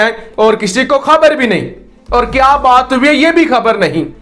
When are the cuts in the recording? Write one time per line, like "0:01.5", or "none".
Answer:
none